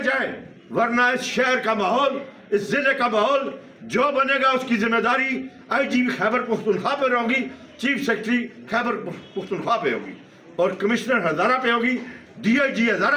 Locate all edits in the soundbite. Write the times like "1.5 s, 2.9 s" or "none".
none

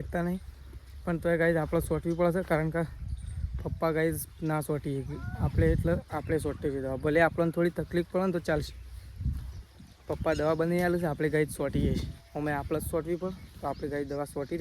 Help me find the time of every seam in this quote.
none

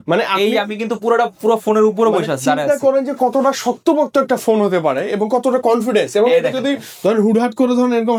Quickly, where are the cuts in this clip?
none

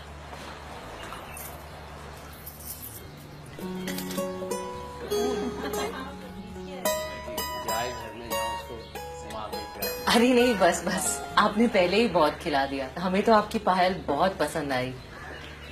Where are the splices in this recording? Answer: 2.6 s

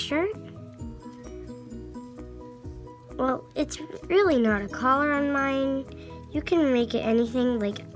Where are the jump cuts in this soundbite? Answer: none

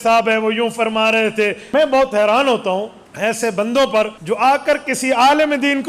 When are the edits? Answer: 1.6 s, 3.0 s, 4.2 s

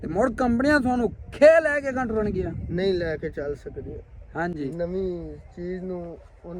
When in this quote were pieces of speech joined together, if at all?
none

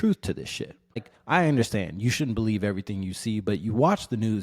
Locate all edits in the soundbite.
1.1 s

